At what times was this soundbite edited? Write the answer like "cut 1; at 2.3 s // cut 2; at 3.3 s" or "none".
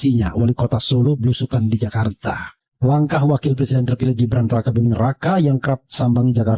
cut 1; at 2.6 s